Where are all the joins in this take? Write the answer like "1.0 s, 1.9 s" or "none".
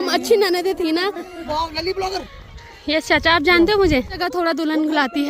1.4 s, 4.2 s